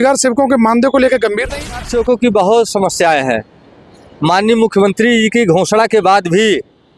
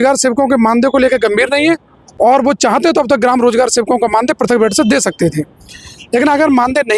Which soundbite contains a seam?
first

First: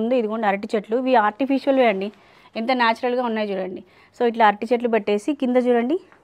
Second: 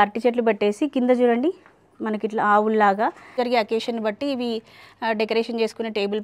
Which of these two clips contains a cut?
second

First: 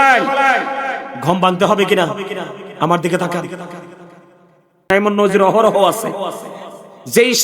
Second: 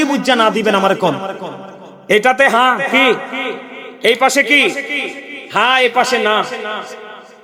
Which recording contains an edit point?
first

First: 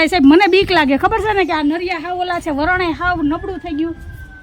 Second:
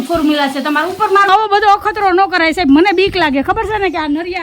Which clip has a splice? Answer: second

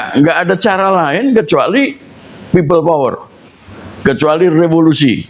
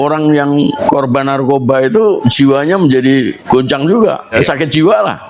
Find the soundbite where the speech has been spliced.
second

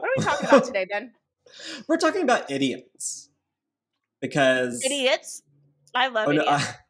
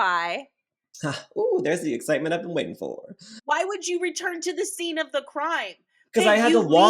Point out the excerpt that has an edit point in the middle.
second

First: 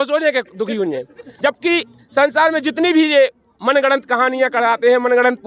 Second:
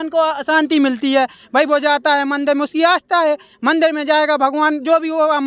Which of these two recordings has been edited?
first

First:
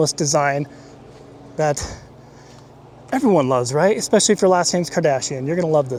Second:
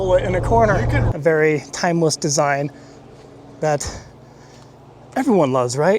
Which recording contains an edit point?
second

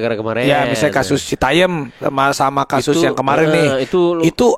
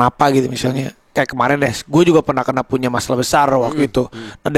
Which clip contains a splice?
second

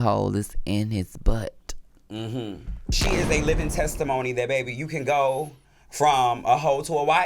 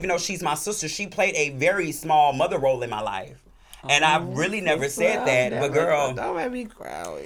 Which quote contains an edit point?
first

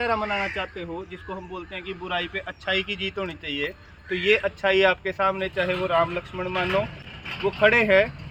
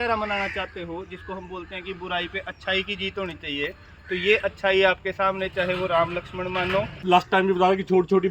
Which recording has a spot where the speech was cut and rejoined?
second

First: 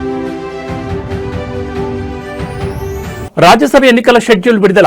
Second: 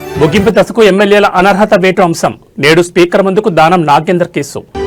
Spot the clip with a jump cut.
first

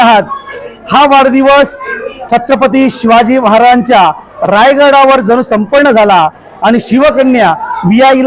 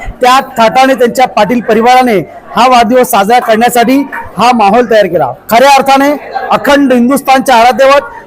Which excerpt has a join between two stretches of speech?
second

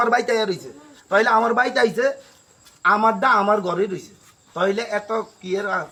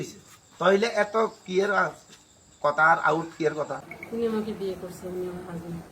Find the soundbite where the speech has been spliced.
second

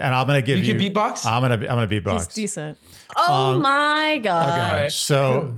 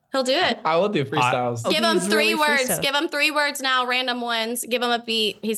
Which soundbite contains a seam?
second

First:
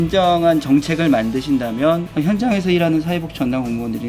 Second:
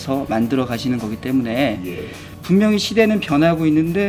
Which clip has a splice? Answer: first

